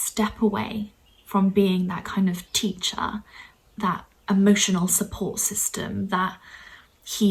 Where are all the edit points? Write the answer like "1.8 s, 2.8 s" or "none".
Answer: none